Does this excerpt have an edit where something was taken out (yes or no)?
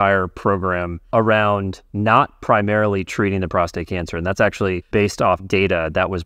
yes